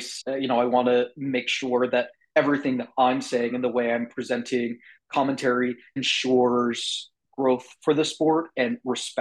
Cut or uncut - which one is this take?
uncut